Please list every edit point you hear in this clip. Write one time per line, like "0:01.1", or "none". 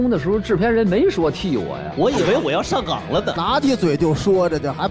0:03.4